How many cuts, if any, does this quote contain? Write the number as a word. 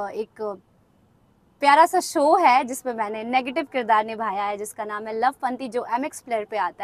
zero